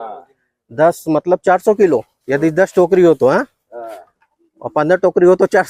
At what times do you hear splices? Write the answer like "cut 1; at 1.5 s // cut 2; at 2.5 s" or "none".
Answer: none